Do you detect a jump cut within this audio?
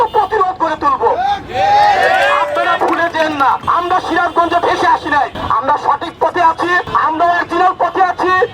yes; 3 cuts; at 3.6 s, 5.4 s, 6.9 s

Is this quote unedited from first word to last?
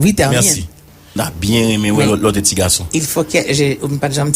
no; 1 cut; at 1.0 s

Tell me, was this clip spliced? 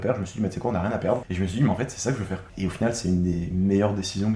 yes; 2 cuts; at 1.3 s, 2.4 s

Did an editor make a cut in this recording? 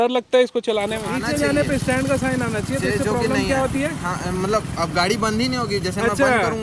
yes; 1 cut; at 1.1 s

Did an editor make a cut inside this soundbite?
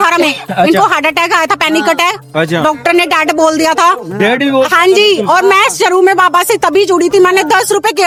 no; 0 cuts

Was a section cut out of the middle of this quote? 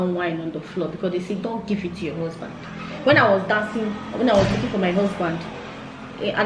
no; 0 cuts

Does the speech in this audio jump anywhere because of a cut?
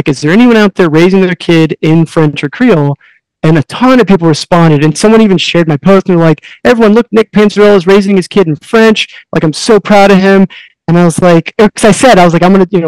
no; 0 cuts

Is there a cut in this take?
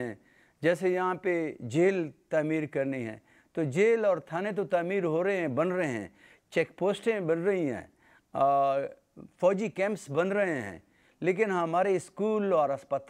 no; 0 cuts

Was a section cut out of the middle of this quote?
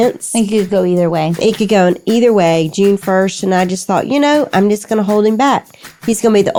no; 0 cuts

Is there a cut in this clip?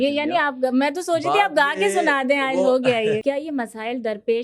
yes; 1 cut; at 3.2 s

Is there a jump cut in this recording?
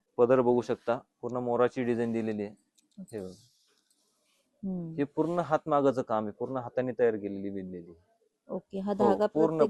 no; 0 cuts

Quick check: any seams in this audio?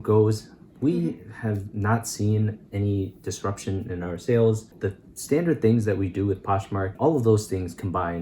yes; 2 cuts; at 4.7 s, 6.9 s

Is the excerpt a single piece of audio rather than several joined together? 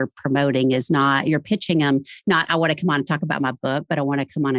yes; 0 cuts

